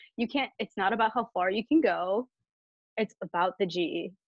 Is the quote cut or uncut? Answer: uncut